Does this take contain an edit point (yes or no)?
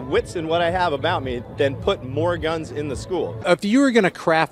no